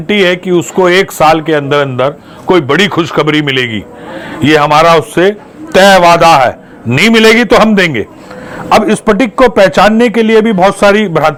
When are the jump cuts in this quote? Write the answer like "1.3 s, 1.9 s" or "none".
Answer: none